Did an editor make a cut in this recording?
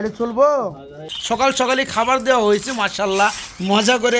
yes; 1 cut; at 1.1 s

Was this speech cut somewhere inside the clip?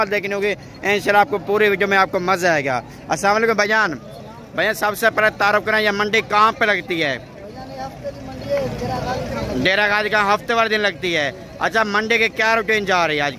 no; 0 cuts

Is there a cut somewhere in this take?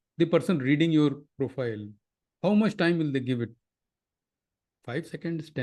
no; 0 cuts

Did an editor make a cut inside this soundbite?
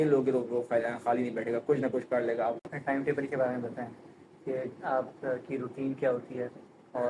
yes; 1 cut; at 2.6 s

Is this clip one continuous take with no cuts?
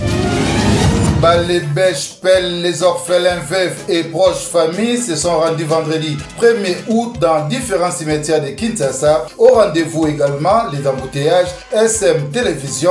no; 1 cut; at 1.2 s

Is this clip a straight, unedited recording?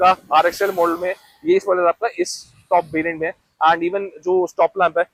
yes; 0 cuts

